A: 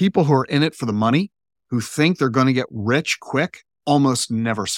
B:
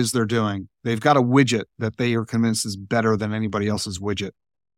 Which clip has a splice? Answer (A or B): A